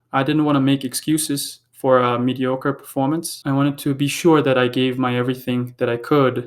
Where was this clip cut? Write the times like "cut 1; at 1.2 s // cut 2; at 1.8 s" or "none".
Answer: cut 1; at 3.3 s